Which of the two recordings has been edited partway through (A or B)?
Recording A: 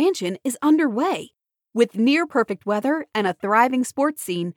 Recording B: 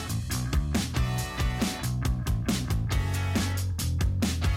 B